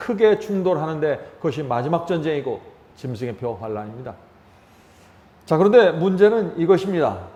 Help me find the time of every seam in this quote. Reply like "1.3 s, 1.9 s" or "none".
none